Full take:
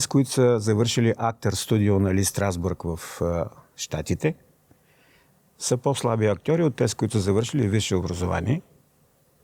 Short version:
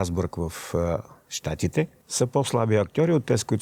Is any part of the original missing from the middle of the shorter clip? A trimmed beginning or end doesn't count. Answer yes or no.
yes